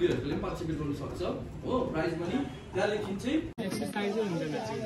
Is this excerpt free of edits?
no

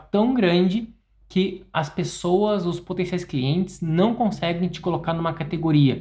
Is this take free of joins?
yes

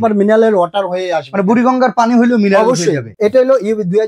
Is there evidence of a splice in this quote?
yes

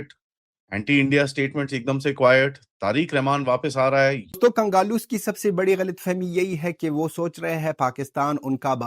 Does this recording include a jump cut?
yes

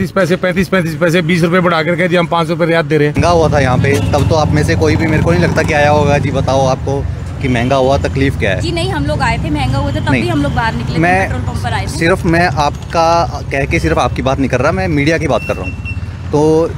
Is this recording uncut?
no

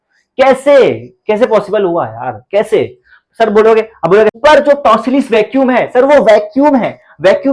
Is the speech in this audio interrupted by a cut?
yes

